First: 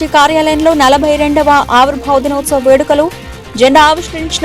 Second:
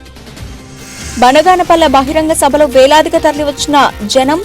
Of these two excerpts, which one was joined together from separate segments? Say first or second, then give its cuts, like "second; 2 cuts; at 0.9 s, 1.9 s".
second; 1 cut; at 1.0 s